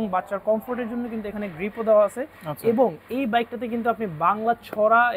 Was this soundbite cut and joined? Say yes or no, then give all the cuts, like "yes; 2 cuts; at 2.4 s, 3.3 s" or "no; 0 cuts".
no; 0 cuts